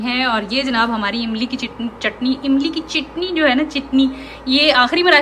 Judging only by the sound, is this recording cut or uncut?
uncut